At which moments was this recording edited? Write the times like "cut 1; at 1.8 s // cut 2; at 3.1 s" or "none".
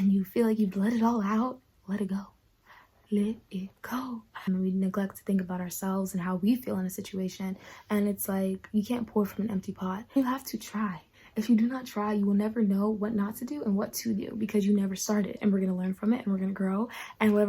cut 1; at 4.4 s // cut 2; at 10.2 s // cut 3; at 15.4 s